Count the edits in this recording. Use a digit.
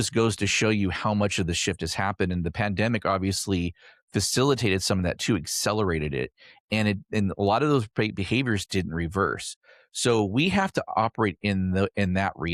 0